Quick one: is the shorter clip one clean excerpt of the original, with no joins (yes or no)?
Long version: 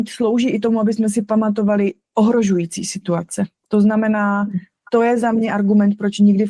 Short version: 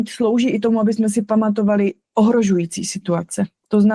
yes